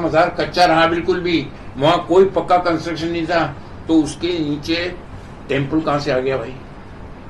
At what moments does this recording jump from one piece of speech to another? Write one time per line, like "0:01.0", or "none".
none